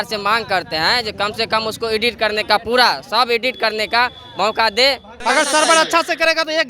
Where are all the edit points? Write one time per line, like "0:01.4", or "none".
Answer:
0:05.1